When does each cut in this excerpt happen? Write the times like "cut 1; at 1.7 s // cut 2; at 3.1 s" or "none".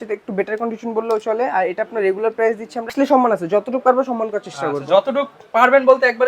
cut 1; at 2.9 s

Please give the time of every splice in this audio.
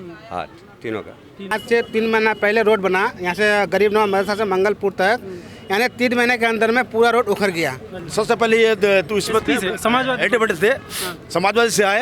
cut 1; at 1.5 s // cut 2; at 8.0 s

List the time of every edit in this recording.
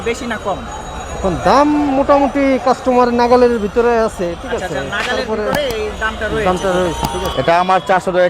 cut 1; at 7.1 s

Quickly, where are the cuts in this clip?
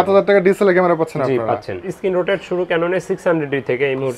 cut 1; at 1.8 s

